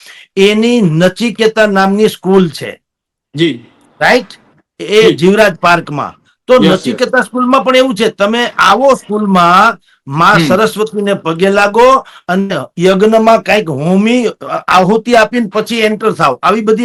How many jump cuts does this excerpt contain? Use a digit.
0